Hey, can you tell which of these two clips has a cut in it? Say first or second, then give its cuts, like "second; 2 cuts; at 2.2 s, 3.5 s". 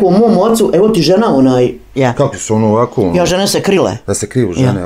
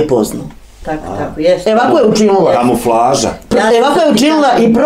first; 1 cut; at 1.8 s